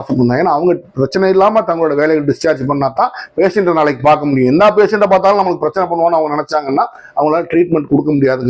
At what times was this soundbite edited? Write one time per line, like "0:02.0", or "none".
none